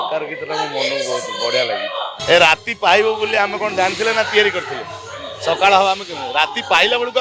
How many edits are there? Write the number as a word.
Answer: one